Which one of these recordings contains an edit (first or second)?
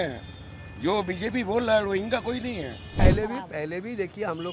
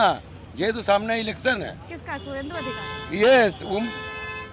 first